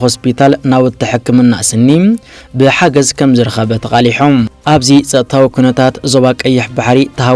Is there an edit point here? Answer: yes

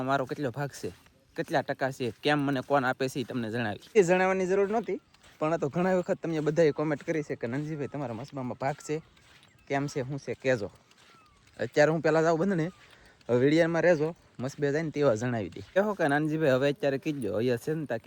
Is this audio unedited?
yes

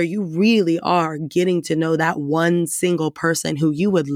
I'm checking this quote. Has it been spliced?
no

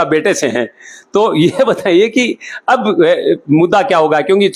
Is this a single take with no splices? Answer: yes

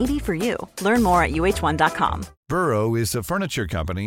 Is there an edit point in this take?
yes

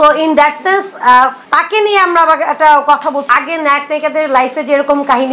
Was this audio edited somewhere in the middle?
yes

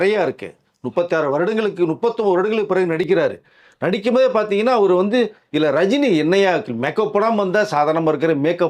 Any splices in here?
no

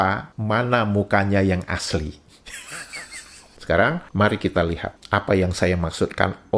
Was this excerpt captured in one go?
no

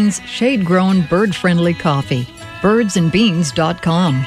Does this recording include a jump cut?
no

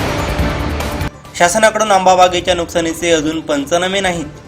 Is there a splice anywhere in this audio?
yes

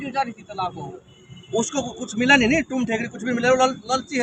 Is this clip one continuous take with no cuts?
yes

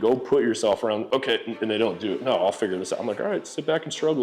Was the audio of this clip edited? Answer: yes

